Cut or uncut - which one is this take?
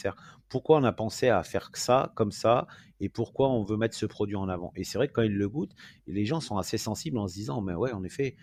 uncut